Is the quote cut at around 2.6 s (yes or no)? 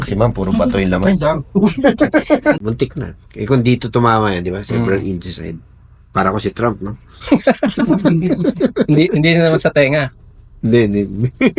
yes